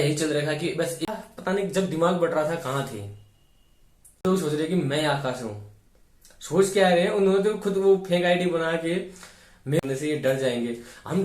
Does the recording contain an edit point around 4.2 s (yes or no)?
yes